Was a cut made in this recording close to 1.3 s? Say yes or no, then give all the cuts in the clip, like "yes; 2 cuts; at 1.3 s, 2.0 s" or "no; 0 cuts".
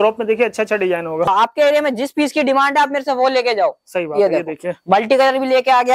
yes; 1 cut; at 1.3 s